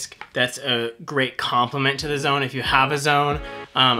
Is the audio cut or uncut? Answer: uncut